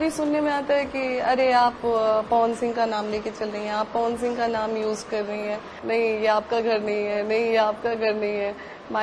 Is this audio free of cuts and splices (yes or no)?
no